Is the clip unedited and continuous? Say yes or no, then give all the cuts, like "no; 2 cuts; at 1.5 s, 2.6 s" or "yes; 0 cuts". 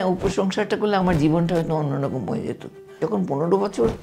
no; 1 cut; at 3.0 s